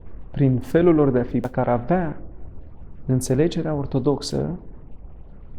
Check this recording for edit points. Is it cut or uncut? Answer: cut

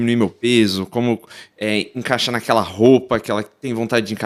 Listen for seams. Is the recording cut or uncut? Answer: uncut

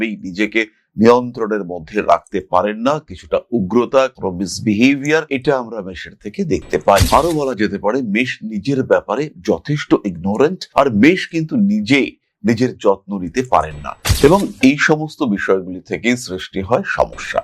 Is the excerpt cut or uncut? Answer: cut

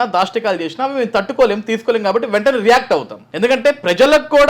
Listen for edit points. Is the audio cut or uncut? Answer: cut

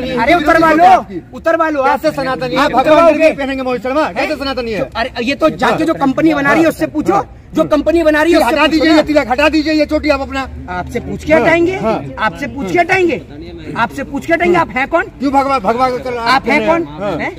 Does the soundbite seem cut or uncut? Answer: uncut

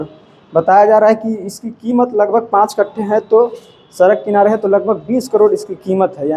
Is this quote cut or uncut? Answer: uncut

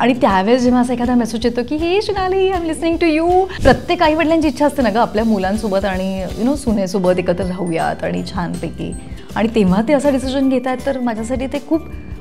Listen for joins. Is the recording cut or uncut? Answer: cut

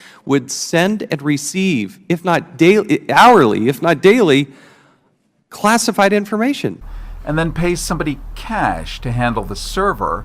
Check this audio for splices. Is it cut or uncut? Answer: cut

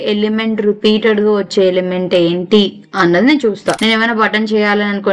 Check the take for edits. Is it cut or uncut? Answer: cut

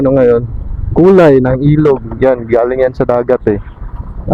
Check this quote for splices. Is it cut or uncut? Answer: uncut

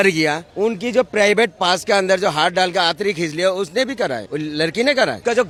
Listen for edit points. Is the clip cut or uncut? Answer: uncut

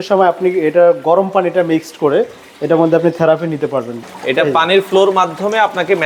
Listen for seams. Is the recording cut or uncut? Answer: cut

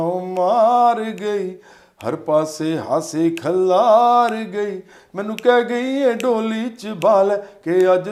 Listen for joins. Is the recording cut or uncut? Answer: uncut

